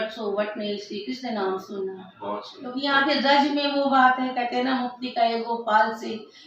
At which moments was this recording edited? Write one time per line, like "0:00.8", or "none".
0:02.6